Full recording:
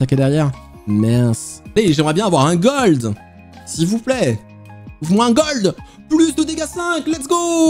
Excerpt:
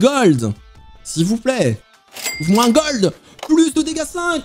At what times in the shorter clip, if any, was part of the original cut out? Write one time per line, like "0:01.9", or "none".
none